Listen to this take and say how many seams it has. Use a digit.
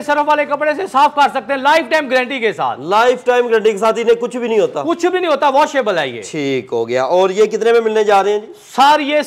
0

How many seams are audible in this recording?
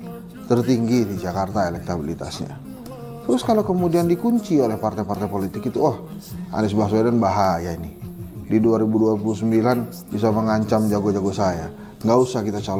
0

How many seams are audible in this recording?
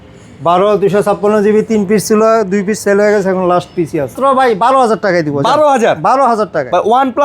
1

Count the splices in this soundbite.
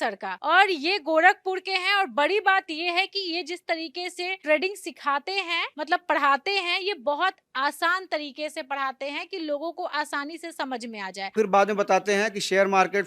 1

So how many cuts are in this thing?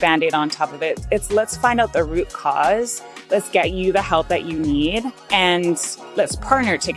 1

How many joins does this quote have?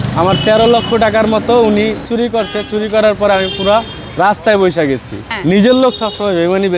0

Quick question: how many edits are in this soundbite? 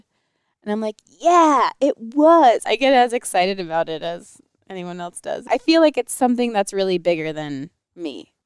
2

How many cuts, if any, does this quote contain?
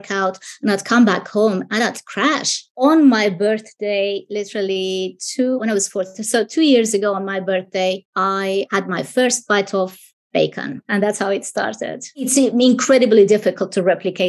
4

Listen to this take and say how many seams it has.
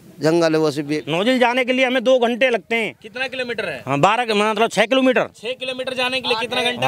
1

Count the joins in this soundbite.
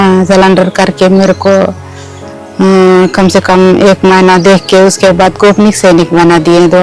0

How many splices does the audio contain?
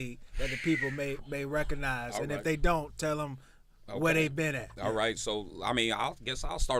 0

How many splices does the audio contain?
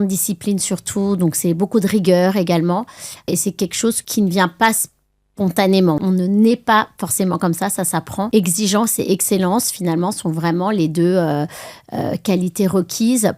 2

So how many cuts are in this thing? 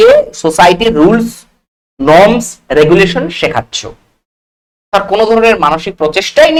0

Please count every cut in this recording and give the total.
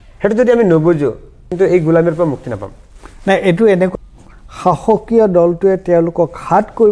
2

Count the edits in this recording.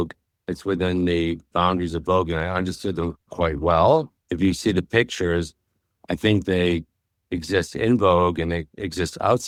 0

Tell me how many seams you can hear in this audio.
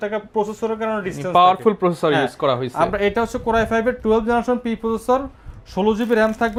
0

